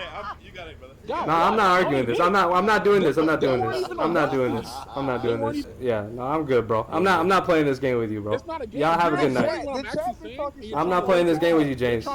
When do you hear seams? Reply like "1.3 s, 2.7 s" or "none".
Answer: 5.7 s